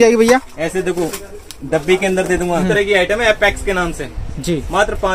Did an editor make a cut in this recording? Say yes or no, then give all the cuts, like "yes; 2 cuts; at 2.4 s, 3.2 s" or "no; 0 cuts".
yes; 1 cut; at 2.6 s